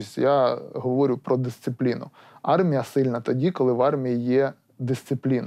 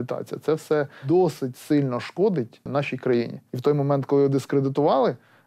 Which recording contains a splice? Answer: second; 3 cuts; at 1.0 s, 2.6 s, 3.5 s

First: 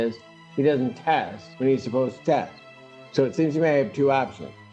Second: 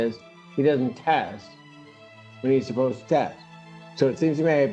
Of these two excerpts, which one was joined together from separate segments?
first; 1 cut; at 1.4 s

